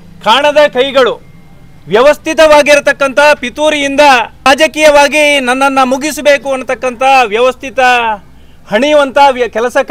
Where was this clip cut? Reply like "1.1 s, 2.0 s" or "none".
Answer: 4.5 s